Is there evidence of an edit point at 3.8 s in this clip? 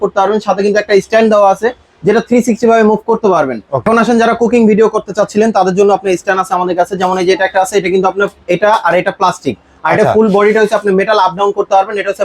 yes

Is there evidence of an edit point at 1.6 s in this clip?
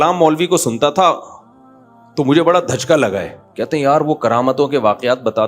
no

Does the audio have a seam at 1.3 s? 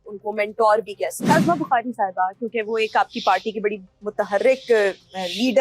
yes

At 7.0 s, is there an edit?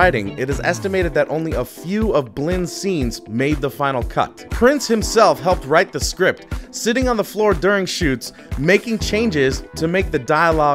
yes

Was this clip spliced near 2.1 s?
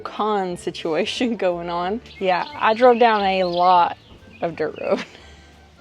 yes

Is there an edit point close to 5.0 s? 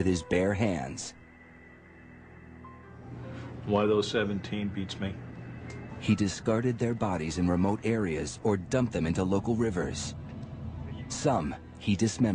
no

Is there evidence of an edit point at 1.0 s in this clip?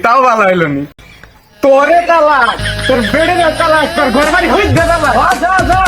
yes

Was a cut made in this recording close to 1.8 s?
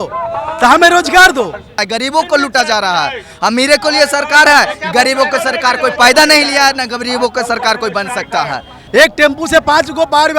yes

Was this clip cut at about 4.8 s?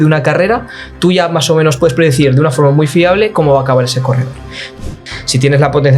yes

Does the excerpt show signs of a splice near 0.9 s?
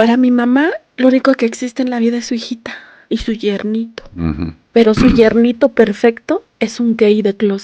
yes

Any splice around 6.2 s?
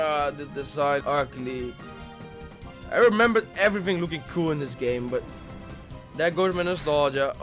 no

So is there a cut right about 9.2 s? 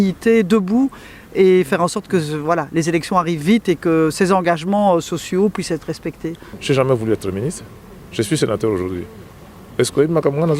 no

